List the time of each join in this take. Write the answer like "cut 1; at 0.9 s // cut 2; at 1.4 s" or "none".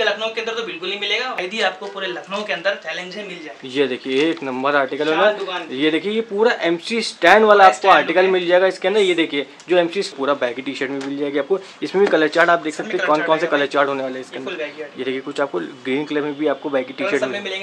cut 1; at 1.4 s // cut 2; at 10.1 s